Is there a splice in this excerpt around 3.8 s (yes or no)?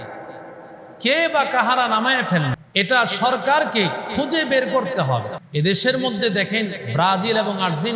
no